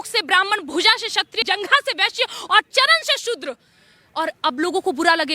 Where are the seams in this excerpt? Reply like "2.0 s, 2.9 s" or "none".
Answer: 1.4 s